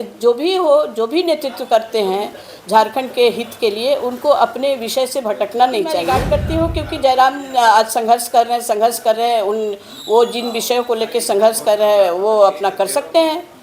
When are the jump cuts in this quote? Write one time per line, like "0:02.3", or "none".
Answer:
0:06.1